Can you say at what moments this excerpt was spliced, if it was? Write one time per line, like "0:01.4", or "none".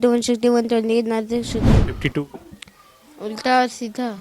0:01.8